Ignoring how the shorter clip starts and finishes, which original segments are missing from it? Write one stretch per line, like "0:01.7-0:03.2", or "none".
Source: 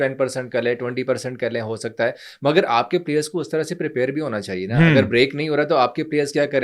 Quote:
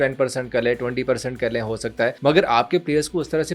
0:02.2-0:02.4